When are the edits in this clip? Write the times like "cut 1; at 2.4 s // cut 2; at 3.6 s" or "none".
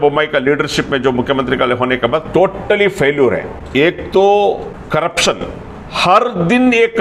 none